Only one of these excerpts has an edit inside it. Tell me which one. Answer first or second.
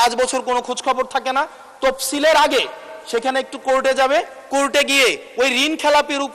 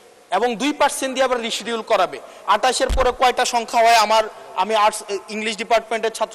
second